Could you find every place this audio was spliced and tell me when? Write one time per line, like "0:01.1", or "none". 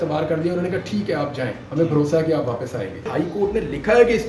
0:03.1